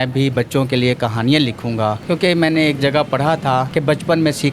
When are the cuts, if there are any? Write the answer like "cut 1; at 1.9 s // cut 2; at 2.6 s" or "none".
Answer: cut 1; at 2.0 s // cut 2; at 3.7 s